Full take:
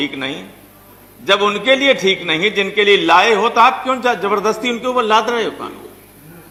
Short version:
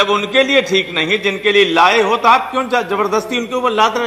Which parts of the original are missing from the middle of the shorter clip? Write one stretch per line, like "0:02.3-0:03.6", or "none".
none

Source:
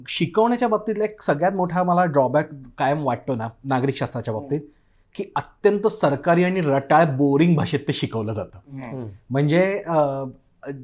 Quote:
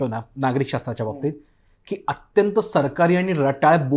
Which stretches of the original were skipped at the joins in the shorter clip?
none

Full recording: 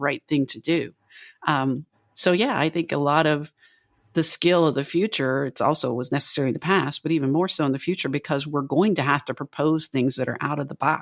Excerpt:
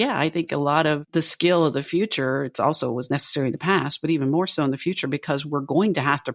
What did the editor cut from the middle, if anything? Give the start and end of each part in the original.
0:03.4-0:04.1

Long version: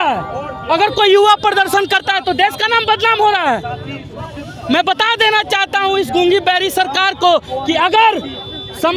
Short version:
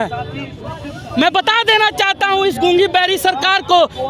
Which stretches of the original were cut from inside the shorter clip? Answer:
none

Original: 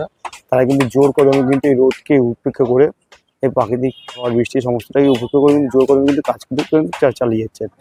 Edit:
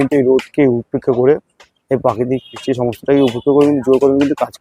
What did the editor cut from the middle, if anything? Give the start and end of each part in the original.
0:04.1-0:04.5

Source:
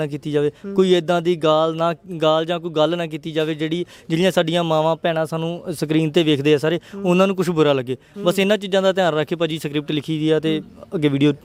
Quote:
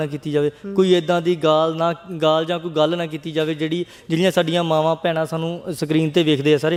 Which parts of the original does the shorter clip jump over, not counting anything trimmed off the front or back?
none

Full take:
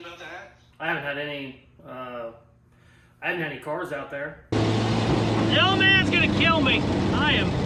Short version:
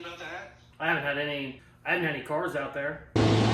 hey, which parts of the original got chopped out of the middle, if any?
0:01.7-0:03.0

